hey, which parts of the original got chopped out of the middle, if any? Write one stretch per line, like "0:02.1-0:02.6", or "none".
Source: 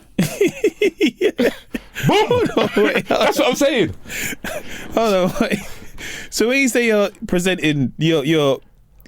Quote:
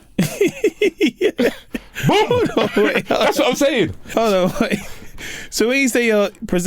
0:04.0-0:04.8